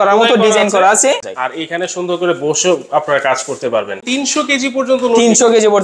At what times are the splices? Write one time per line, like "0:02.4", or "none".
0:01.2
0:04.0